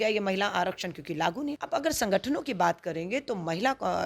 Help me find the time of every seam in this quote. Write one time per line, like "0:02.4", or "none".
none